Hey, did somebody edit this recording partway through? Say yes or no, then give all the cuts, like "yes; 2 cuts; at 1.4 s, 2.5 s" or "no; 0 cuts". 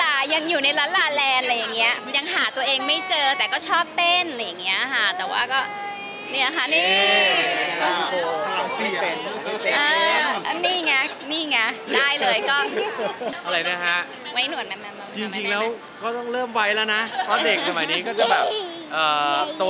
yes; 1 cut; at 13.3 s